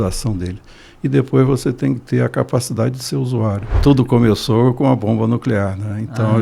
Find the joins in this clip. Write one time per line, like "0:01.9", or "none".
0:03.8